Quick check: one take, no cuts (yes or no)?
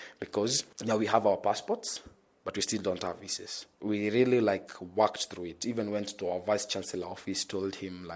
no